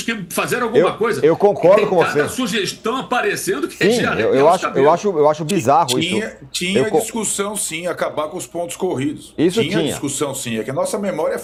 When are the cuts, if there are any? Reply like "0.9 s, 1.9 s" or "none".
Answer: none